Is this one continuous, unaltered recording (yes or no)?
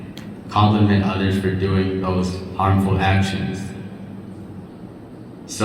no